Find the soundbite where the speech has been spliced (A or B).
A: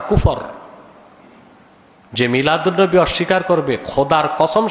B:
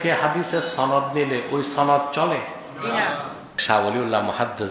B